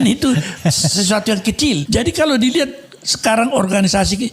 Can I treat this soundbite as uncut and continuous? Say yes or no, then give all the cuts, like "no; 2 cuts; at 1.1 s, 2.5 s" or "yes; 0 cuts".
no; 1 cut; at 1.8 s